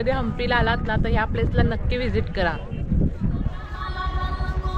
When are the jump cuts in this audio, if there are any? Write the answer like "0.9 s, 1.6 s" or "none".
3.7 s